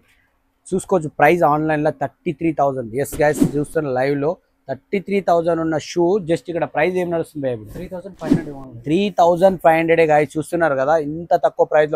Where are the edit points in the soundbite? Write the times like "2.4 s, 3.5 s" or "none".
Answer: none